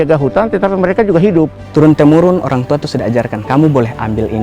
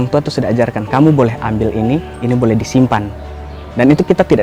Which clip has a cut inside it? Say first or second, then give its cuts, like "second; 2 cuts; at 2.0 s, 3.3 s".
first; 1 cut; at 1.6 s